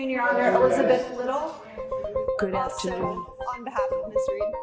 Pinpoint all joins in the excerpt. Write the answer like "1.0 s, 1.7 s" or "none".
none